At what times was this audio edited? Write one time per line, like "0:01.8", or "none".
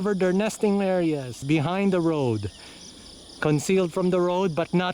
0:01.4